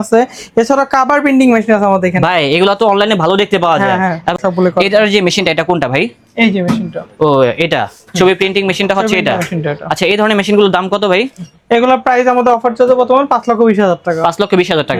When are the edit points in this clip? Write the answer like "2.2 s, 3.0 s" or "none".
none